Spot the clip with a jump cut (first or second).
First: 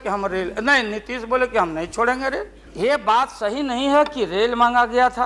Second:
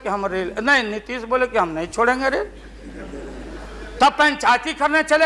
first